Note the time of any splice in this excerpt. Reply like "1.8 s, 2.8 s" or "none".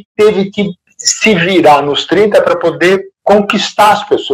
3.2 s